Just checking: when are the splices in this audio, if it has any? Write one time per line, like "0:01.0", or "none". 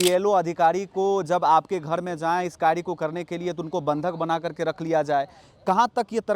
none